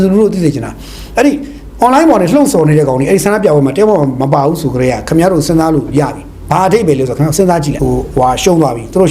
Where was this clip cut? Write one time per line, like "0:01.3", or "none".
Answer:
0:07.7